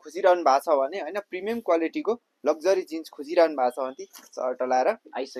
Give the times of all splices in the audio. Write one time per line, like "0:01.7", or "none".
none

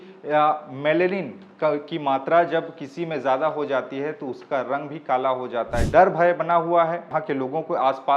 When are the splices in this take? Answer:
0:05.8
0:07.1

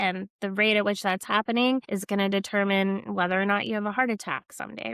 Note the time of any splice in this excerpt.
0:01.9

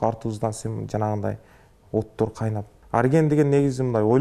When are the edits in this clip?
0:02.7

